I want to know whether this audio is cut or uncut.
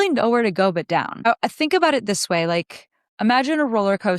cut